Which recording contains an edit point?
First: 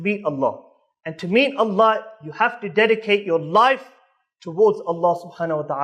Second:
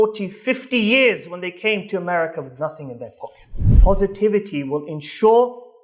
second; 1 cut; at 3.7 s

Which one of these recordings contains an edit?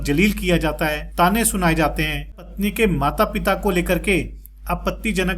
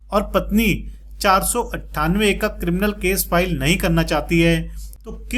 first; 2 cuts; at 1.0 s, 2.4 s

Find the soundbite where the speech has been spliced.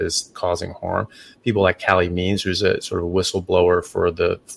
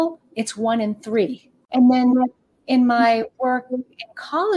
second; 1 cut; at 1.6 s

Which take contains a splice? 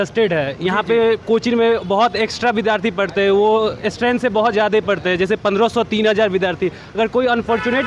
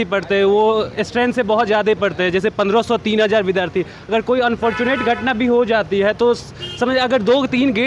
first; 1 cut; at 1.2 s

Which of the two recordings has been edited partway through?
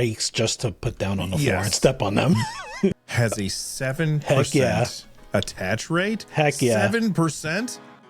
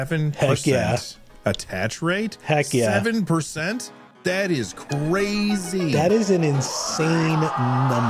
first; 1 cut; at 2.9 s

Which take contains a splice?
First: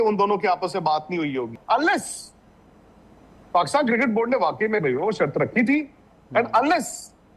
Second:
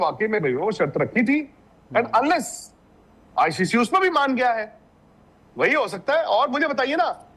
first; 1 cut; at 1.6 s

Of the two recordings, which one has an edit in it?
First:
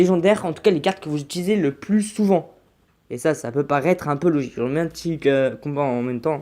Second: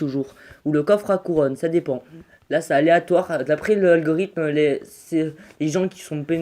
first; 1 cut; at 5.4 s

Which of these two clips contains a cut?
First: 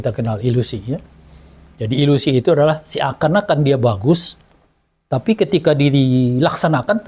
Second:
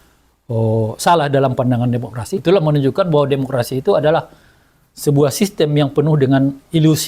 second; 1 cut; at 2.3 s

